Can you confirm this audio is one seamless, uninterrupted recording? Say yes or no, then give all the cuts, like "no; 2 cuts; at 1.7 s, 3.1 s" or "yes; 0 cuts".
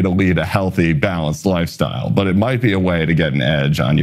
yes; 0 cuts